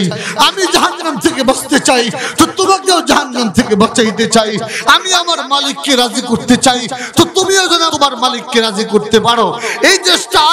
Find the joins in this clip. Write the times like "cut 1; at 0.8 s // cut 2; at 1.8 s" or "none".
cut 1; at 7.9 s